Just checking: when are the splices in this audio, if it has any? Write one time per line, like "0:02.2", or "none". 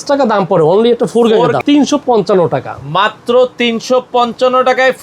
0:01.6